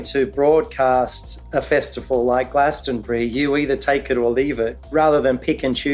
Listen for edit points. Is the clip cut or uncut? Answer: cut